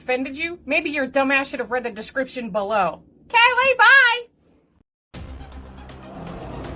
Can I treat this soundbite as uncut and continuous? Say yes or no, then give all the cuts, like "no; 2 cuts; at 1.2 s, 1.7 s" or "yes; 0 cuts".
no; 1 cut; at 4.9 s